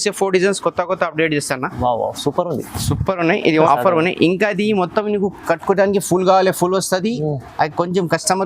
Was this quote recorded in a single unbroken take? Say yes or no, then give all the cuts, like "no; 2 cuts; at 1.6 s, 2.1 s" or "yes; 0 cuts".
no; 1 cut; at 3.7 s